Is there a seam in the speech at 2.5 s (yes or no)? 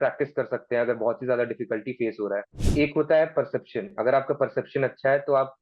yes